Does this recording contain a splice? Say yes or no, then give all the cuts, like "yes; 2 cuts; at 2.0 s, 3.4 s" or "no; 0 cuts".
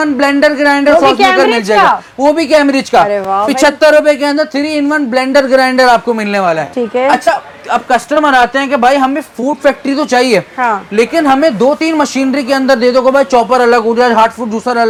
no; 0 cuts